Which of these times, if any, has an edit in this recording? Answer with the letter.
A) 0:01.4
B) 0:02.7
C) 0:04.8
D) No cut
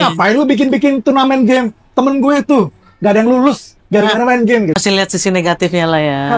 C